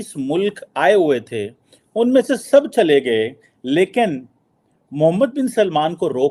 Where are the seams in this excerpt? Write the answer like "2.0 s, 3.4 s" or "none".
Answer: none